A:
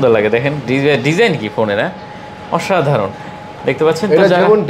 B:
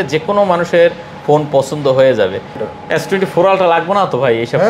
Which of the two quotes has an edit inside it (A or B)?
B